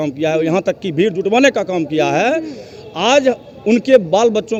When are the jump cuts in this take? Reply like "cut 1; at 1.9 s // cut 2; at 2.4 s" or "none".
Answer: none